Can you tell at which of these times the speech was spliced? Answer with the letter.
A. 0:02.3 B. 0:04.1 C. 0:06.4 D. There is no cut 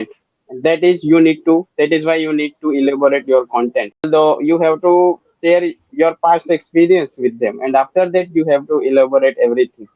B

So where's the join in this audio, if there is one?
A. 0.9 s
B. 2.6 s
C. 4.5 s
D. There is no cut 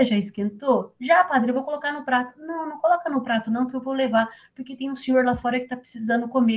D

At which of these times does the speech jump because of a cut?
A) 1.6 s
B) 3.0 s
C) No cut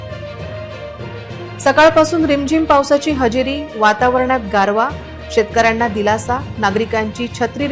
A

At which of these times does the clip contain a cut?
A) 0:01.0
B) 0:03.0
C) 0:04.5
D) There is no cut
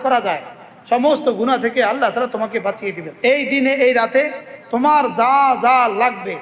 B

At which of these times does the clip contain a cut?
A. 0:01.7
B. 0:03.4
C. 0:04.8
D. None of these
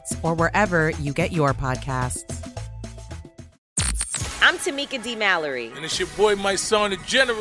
B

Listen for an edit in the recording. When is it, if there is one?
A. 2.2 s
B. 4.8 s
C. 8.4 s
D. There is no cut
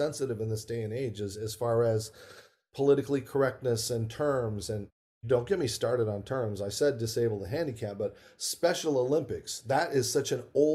D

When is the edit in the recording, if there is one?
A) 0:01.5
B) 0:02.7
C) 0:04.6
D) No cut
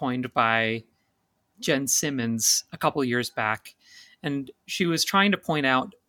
A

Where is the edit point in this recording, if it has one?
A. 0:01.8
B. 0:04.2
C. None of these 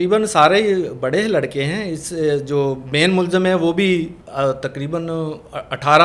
B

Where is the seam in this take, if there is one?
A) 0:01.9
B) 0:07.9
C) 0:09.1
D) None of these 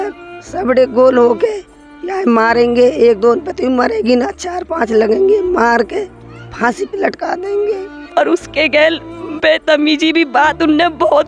B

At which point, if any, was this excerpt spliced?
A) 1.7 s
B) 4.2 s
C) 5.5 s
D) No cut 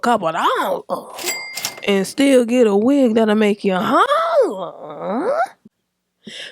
A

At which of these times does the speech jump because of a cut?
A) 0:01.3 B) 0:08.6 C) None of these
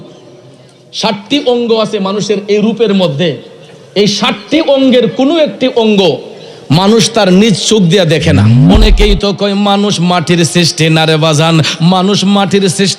B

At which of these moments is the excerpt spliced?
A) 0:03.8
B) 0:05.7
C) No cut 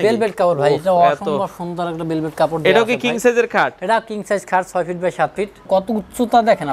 B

